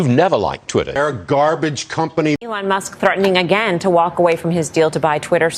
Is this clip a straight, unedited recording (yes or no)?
no